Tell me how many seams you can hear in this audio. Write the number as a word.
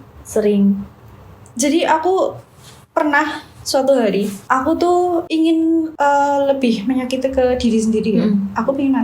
two